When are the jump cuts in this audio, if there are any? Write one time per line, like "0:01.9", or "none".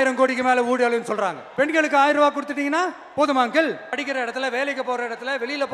0:01.4
0:04.0